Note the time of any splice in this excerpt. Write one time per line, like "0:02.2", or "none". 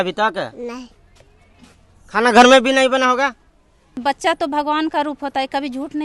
0:04.0